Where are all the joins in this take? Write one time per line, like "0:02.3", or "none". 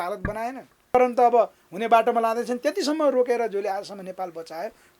0:00.9